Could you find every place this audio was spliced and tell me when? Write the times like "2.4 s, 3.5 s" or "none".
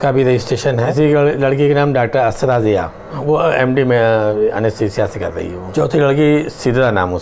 0.9 s, 3.2 s, 5.6 s

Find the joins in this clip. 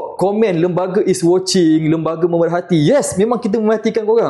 none

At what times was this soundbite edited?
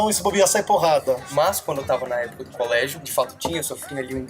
1.2 s, 3.0 s

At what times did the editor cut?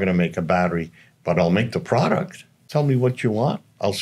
2.7 s

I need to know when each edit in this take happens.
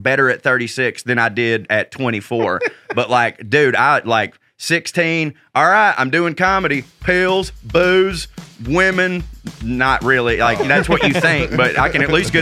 none

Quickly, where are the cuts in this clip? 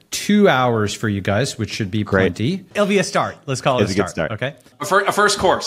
2.8 s, 4.7 s

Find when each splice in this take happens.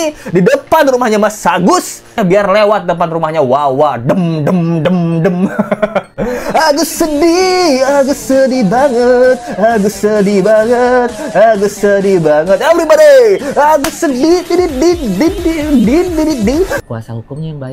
2.1 s, 16.8 s

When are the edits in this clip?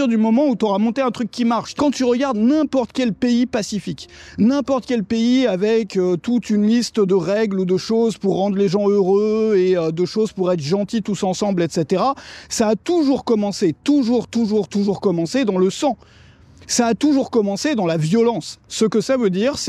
1.8 s, 18.5 s

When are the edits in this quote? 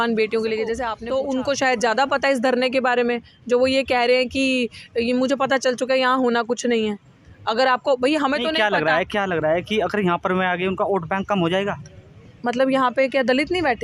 0.9 s

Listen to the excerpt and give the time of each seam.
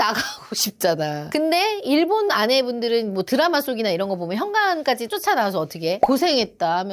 1.3 s

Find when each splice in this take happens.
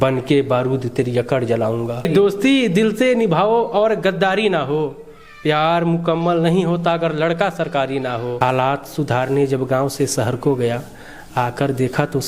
2.1 s, 8.3 s

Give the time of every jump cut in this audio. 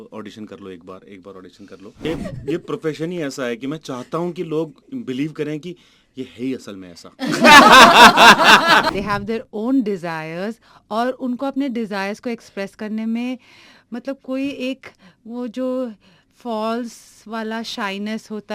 2.0 s, 8.9 s

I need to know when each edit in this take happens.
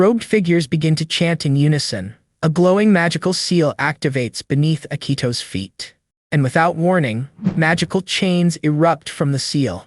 2.2 s

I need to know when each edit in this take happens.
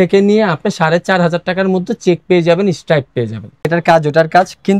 3.7 s

